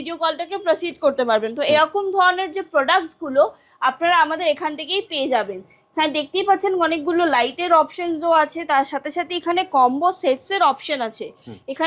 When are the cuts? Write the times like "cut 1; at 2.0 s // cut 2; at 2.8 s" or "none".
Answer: none